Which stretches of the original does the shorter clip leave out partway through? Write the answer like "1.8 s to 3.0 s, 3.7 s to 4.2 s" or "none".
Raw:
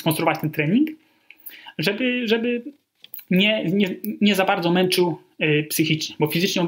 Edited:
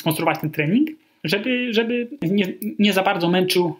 1.1 s to 1.6 s, 2.7 s to 3.6 s